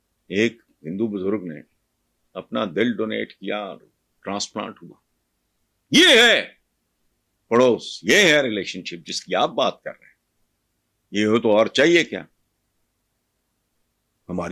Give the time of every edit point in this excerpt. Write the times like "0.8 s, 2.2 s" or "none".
none